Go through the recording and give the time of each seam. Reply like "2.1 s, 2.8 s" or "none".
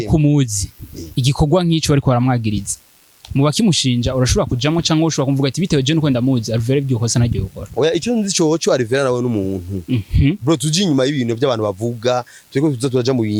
none